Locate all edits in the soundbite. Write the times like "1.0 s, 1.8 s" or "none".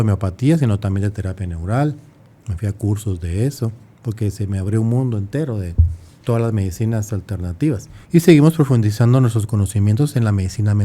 7.9 s